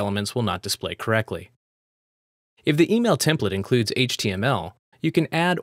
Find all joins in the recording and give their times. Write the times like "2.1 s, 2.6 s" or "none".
none

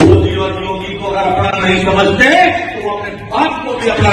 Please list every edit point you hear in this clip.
none

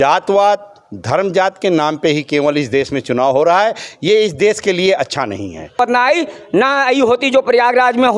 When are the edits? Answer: 5.8 s

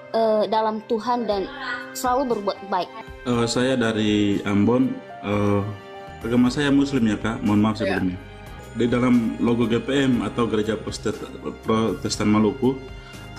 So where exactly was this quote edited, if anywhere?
3.0 s, 6.1 s, 8.6 s

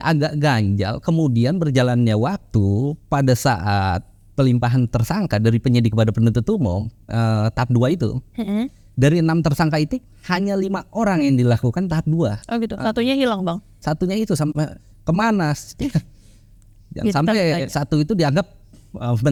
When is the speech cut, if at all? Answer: none

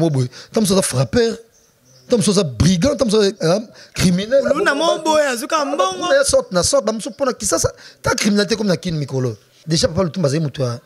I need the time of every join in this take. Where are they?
9.5 s

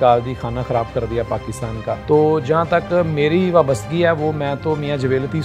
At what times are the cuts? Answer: 2.0 s

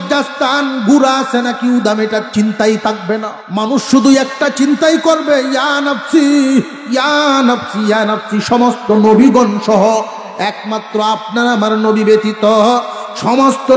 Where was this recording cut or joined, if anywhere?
3.4 s

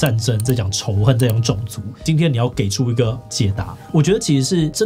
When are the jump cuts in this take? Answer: 2.0 s, 3.8 s

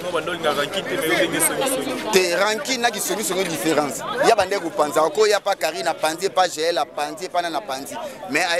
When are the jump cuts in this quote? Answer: none

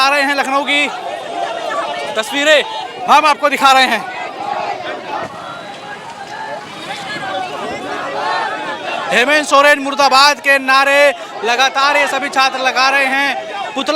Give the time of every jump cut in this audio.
none

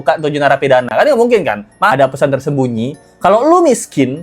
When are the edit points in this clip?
1.9 s

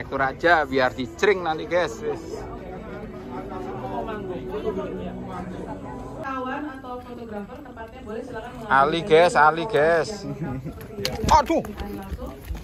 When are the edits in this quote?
none

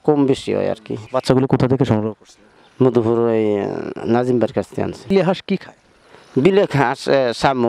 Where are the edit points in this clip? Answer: 1.0 s, 5.1 s

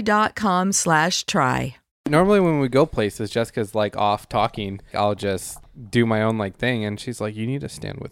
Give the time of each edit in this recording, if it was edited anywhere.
2.1 s, 4.9 s, 5.7 s

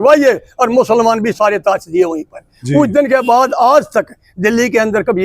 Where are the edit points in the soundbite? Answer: none

